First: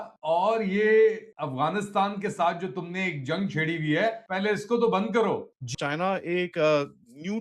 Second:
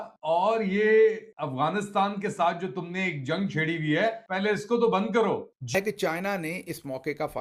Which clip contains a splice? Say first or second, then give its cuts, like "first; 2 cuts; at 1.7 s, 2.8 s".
second; 1 cut; at 5.8 s